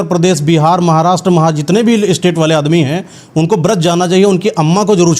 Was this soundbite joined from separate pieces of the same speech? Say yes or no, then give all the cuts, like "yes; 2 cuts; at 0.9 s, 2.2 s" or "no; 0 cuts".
no; 0 cuts